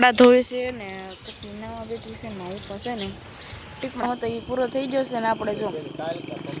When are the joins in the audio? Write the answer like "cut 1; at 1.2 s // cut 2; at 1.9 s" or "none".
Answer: cut 1; at 4.0 s